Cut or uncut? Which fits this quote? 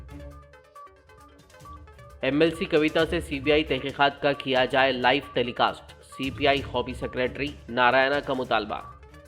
cut